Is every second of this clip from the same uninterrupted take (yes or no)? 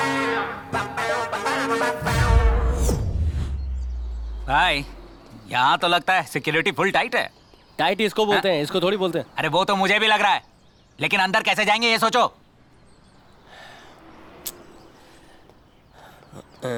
yes